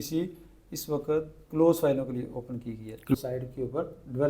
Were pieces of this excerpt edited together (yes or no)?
yes